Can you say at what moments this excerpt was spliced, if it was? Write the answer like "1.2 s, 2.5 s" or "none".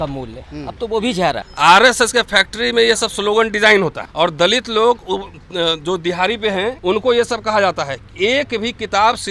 1.5 s, 4.0 s, 6.8 s